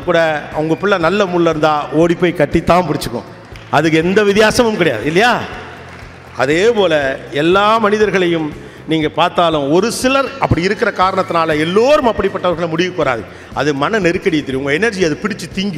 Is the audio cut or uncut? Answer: uncut